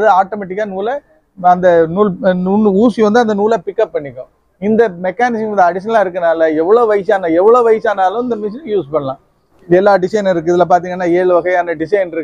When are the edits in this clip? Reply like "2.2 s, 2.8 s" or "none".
9.5 s